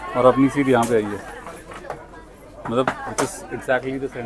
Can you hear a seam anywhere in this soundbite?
no; 0 cuts

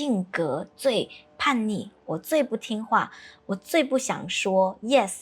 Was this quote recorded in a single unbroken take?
yes; 0 cuts

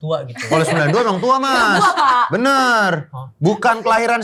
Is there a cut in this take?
no; 0 cuts

